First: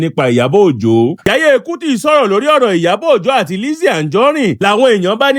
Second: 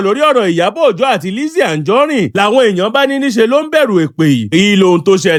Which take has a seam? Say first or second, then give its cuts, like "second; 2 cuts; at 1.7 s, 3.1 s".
first; 1 cut; at 1.2 s